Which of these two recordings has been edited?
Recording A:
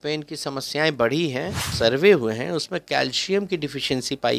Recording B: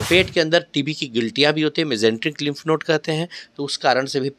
A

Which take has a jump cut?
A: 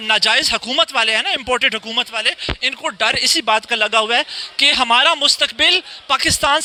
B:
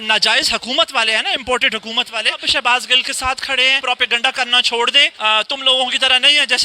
B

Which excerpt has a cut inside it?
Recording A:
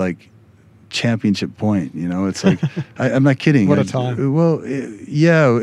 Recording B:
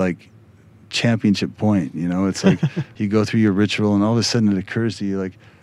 B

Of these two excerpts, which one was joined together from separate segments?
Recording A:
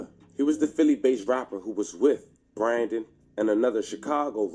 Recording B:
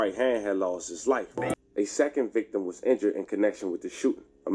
B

